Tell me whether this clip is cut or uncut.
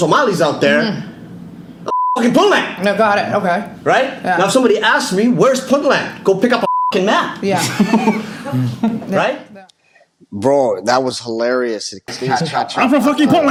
uncut